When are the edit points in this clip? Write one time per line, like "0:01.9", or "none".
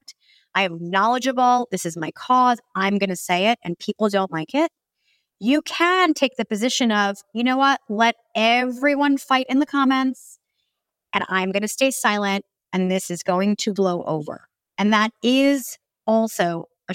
none

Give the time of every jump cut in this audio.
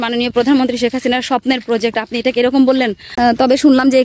0:03.1

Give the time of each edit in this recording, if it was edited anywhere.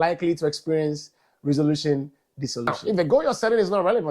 0:02.8

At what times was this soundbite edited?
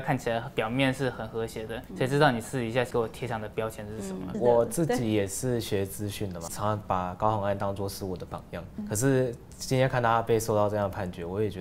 0:01.8
0:02.9
0:04.3
0:06.5
0:08.8

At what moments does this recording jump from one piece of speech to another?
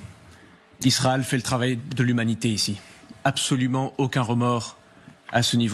none

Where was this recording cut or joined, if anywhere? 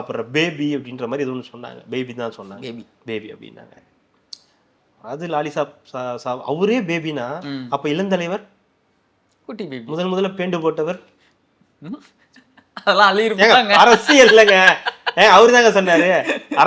none

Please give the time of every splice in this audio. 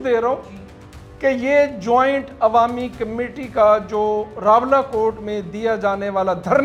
none

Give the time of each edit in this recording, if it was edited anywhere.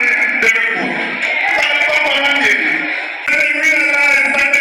0:03.1

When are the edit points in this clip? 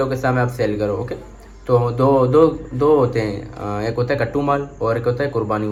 none

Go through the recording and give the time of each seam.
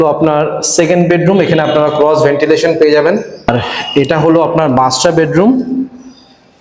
0:03.5

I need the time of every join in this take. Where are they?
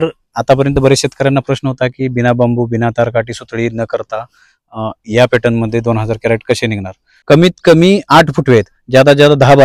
0:07.1

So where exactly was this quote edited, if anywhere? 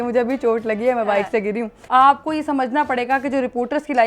0:01.7

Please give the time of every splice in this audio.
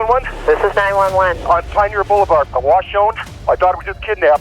0:03.3

